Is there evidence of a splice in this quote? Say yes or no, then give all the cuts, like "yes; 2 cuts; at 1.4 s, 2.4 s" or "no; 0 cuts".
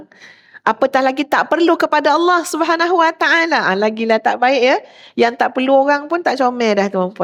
no; 0 cuts